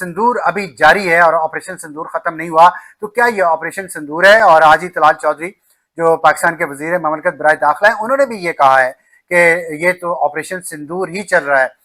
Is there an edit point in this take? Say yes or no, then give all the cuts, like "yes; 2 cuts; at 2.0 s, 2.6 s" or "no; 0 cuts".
no; 0 cuts